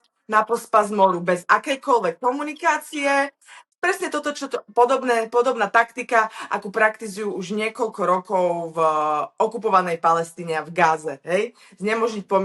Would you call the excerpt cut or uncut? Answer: uncut